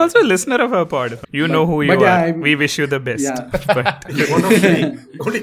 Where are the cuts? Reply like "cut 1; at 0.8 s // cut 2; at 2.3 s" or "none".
cut 1; at 1.2 s